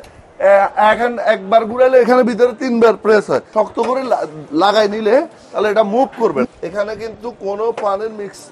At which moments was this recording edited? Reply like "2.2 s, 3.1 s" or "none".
3.5 s, 6.4 s